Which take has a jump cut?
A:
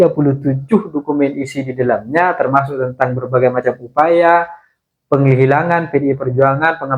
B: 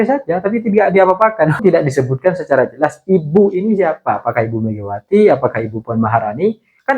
B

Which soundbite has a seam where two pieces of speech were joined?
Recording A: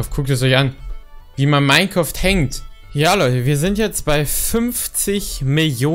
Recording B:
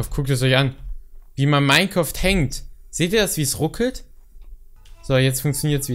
A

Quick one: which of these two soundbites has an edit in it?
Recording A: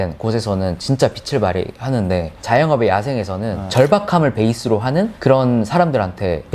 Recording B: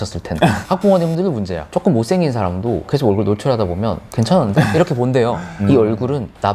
B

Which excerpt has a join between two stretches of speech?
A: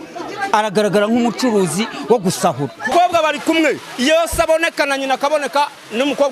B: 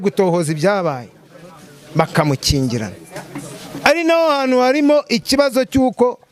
A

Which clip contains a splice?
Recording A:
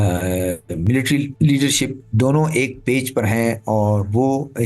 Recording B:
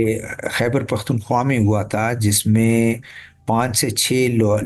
A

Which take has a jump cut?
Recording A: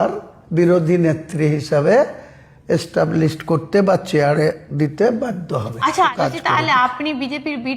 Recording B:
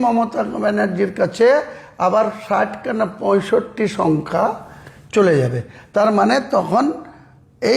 A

